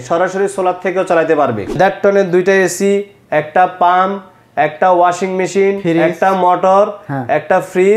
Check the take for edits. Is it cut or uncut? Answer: cut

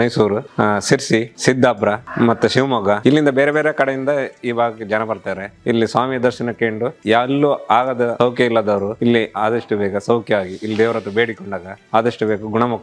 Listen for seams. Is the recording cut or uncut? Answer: uncut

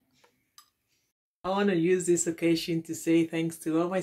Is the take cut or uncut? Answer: cut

